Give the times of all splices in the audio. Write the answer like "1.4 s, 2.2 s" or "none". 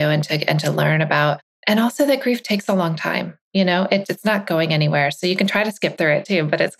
1.5 s